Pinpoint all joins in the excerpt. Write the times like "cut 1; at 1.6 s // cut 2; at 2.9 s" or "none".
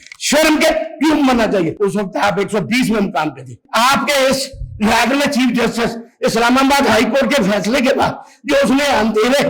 cut 1; at 1.7 s // cut 2; at 3.6 s